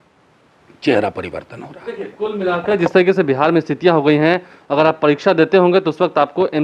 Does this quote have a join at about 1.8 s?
no; 0 cuts

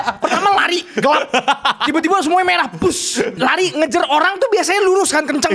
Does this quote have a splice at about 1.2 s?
no; 1 cut; at 3.3 s

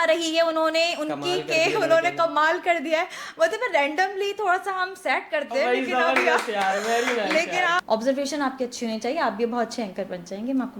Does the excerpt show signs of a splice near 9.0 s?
no; 1 cut; at 7.8 s

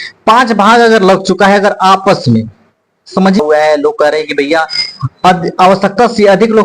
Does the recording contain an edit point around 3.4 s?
yes; 1 cut; at 3.4 s

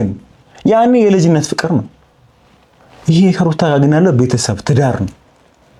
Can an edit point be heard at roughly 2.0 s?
no; 0 cuts

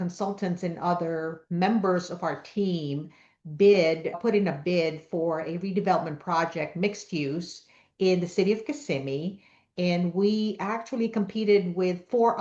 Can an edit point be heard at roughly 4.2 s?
yes; 1 cut; at 4.2 s

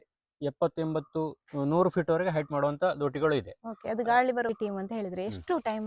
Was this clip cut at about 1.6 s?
no; 1 cut; at 4.5 s

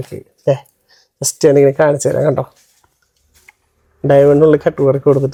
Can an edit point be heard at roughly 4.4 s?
no; 0 cuts

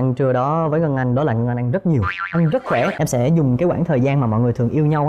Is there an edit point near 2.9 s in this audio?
yes; 1 cut; at 2.9 s

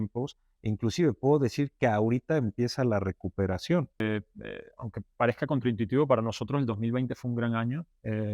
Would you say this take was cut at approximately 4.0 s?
yes; 1 cut; at 4.0 s

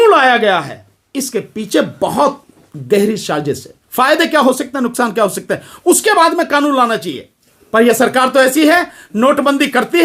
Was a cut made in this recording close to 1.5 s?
no; 1 cut; at 3.8 s

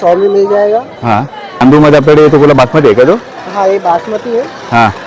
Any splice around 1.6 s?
yes; 1 cut; at 1.6 s

